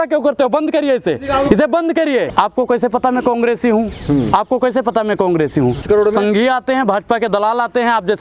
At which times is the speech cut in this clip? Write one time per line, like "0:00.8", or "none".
0:02.3
0:05.8